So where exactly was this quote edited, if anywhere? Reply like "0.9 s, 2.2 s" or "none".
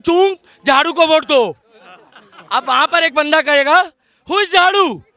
none